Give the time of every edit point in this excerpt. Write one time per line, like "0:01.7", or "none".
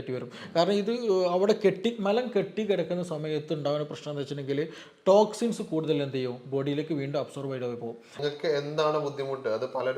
0:08.1